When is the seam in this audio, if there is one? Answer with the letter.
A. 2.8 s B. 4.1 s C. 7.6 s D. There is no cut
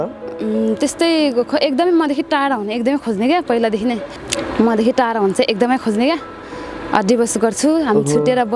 B